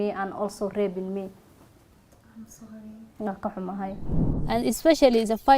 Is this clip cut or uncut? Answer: cut